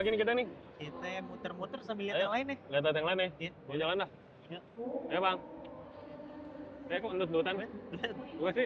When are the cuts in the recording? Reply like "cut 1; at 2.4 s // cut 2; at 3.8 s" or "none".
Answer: none

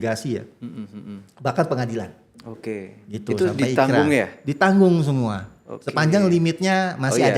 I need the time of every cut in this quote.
none

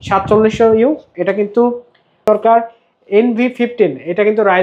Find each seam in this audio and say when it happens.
cut 1; at 2.3 s

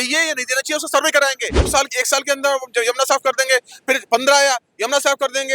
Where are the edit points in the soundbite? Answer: cut 1; at 1.7 s

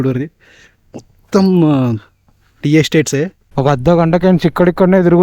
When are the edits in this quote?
cut 1; at 3.4 s

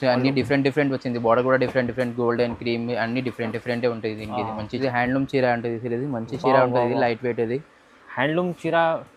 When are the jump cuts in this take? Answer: cut 1; at 4.8 s

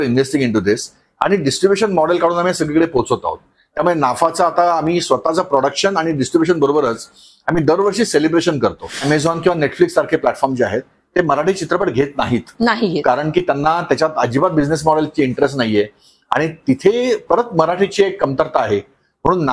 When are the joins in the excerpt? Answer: cut 1; at 9.0 s

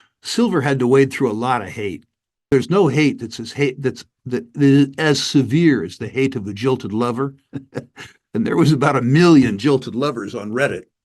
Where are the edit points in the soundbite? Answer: cut 1; at 2.5 s

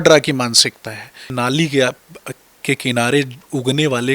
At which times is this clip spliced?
cut 1; at 1.3 s

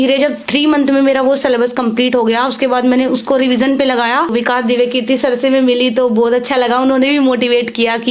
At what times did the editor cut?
cut 1; at 4.3 s

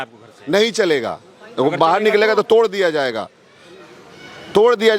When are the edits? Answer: none

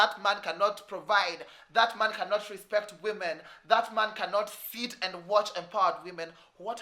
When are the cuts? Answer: none

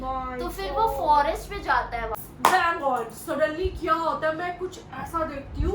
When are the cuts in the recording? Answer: cut 1; at 2.2 s

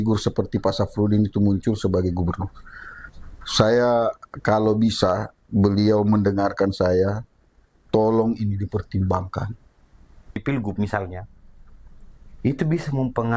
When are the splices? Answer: cut 1; at 10.4 s

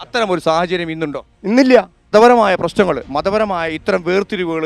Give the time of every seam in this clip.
cut 1; at 2.1 s

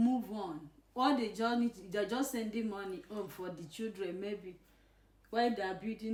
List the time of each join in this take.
none

